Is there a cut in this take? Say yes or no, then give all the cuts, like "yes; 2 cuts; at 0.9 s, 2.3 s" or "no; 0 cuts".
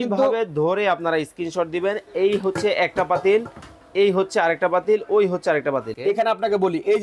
yes; 1 cut; at 5.9 s